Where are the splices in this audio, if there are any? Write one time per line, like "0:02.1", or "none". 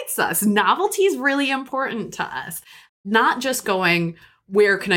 0:02.8